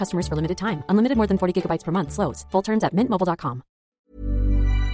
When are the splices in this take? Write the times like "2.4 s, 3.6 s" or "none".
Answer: 4.0 s